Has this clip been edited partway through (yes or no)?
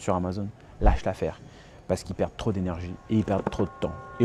no